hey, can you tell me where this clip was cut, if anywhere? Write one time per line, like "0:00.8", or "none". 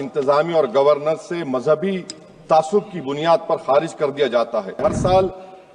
0:04.8